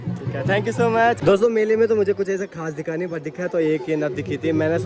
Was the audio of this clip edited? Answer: yes; 1 cut; at 1.2 s

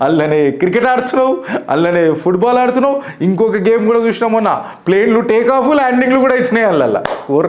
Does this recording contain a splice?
no; 0 cuts

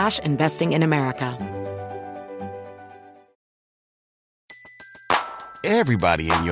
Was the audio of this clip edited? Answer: yes; 1 cut; at 1.3 s

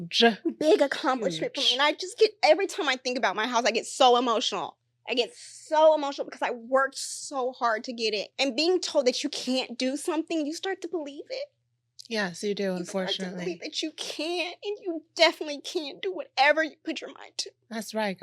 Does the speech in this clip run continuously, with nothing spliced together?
no; 1 cut; at 8.3 s

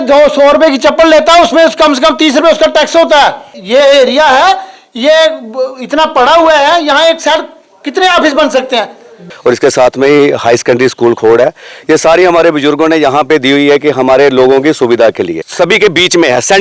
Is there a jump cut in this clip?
yes; 3 cuts; at 3.5 s, 9.2 s, 15.4 s

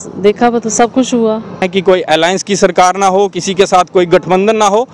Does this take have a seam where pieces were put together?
yes; 1 cut; at 1.7 s

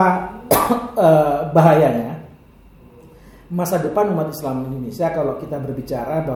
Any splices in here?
no; 0 cuts

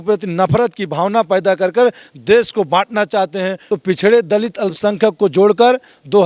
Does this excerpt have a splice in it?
yes; 1 cut; at 3.6 s

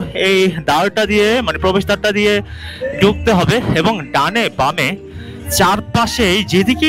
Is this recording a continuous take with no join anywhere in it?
yes; 0 cuts

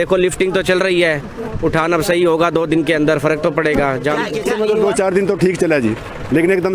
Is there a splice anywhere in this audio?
yes; 1 cut; at 4.4 s

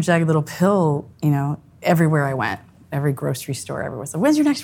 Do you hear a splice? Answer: yes; 1 cut; at 1.1 s

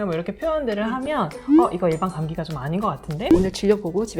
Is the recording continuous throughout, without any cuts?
no; 1 cut; at 3.3 s

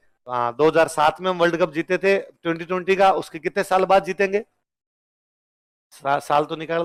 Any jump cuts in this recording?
no; 0 cuts

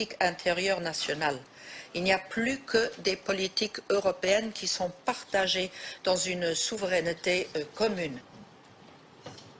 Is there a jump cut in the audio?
no; 0 cuts

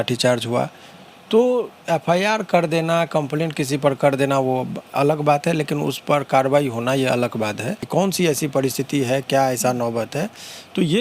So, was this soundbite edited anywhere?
yes; 1 cut; at 7.8 s

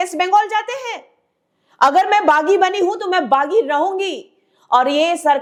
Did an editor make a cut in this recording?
no; 0 cuts

